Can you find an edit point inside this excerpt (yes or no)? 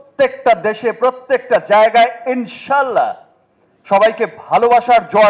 no